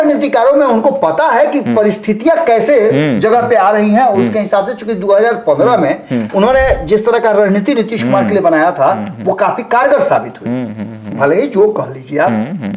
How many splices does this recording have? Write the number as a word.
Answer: zero